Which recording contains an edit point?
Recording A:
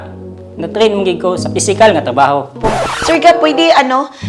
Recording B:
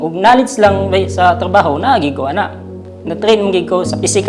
A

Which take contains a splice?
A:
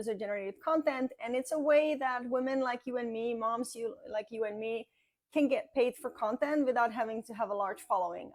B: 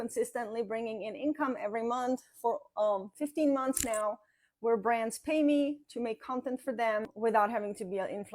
B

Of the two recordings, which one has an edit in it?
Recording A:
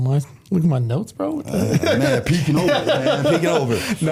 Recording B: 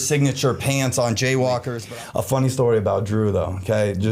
B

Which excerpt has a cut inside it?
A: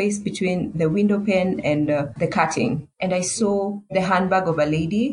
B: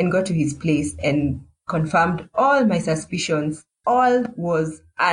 A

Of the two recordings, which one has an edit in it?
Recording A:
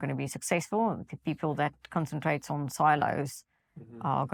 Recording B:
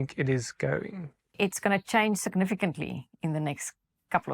B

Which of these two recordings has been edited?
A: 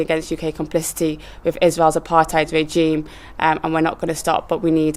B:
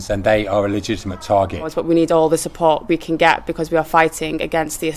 B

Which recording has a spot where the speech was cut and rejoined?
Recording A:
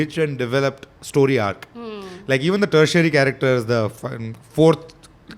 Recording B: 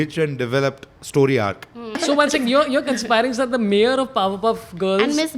B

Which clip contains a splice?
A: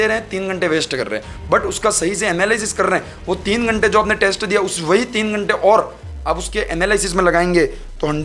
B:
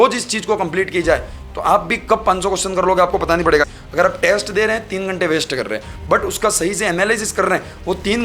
B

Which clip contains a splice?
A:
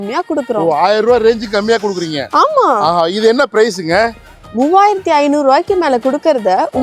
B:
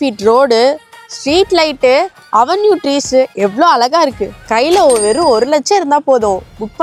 B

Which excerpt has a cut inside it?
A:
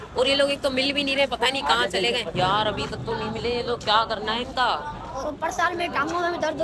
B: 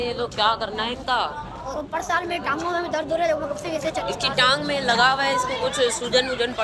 A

